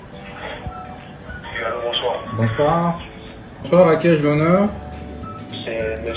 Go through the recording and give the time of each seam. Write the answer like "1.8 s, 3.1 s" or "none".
none